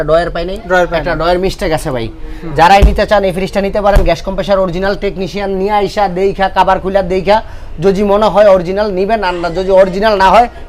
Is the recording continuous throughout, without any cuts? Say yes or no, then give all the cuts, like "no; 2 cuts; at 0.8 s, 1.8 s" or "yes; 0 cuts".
yes; 0 cuts